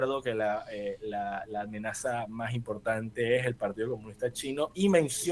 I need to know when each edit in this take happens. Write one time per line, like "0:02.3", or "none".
none